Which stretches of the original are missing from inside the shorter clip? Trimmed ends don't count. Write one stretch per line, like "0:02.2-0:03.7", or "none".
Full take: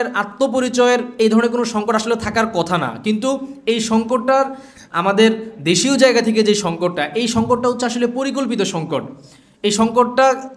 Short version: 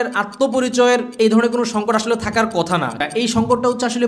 0:03.0-0:07.0